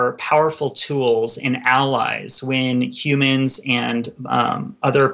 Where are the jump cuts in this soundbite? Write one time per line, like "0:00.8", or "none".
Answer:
none

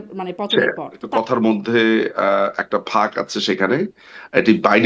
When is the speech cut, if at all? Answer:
0:01.0

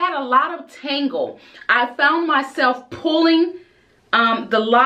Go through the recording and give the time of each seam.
none

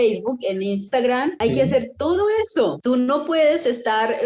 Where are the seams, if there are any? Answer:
0:01.4
0:02.8

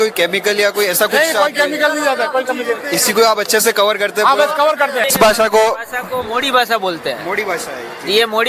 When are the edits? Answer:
0:05.1

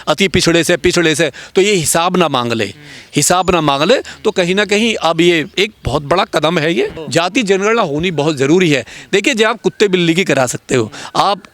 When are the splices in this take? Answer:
0:07.0

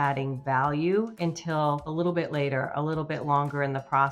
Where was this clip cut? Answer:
0:01.6

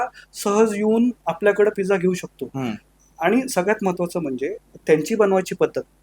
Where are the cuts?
none

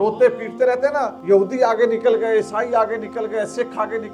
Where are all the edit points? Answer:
0:01.1

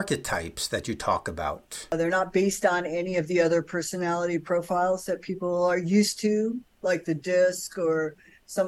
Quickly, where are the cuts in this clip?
0:01.9

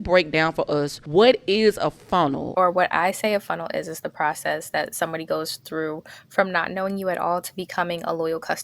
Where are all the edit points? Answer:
0:01.0
0:02.4

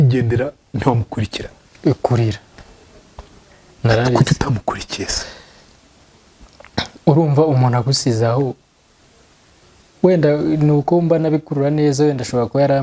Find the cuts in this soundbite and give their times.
none

